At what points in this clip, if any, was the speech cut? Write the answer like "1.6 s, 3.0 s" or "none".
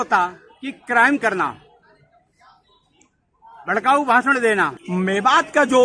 4.8 s